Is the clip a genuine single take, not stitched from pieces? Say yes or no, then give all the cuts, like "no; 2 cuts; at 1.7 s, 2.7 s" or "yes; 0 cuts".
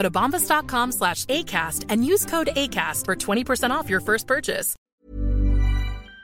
no; 1 cut; at 4.7 s